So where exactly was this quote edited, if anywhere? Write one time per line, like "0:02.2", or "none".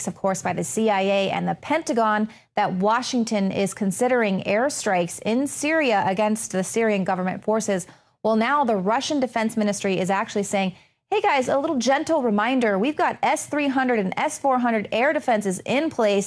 none